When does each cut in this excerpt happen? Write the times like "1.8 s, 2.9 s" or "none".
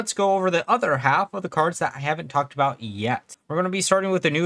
3.3 s